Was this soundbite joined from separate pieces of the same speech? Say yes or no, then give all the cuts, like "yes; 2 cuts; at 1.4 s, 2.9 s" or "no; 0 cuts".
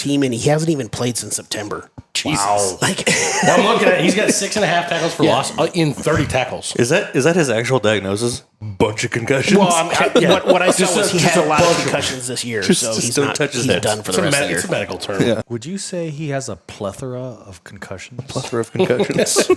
yes; 1 cut; at 15.5 s